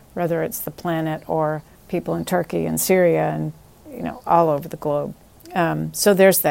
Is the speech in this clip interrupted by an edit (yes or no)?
yes